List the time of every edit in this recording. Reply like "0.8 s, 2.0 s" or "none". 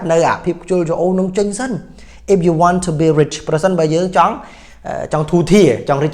none